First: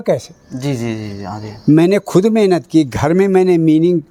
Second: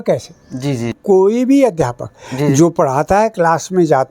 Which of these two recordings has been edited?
second; 1 cut; at 1.0 s

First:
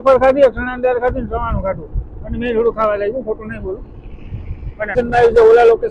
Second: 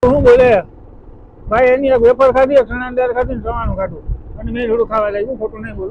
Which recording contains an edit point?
first; 1 cut; at 4.9 s

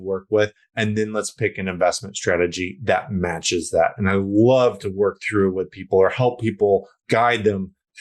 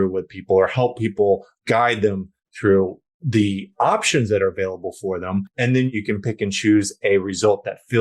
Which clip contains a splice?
second; 1 cut; at 5.5 s

